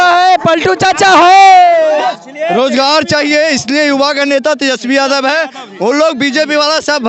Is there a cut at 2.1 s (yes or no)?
yes